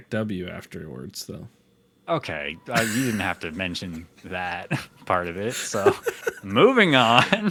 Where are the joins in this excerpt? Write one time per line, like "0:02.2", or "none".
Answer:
none